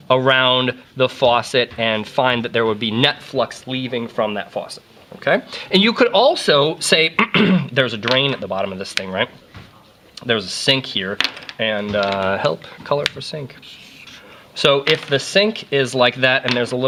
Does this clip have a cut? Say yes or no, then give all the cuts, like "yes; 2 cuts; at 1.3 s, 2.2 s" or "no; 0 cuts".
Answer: no; 0 cuts